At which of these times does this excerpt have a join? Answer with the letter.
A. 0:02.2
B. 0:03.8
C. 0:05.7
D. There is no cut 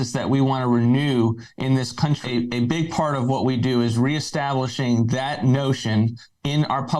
A